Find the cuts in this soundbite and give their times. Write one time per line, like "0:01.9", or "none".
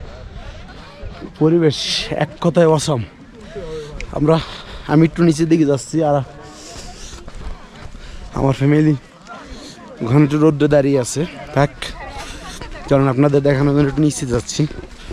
none